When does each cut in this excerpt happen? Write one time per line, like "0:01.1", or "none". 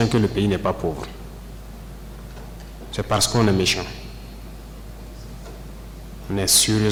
none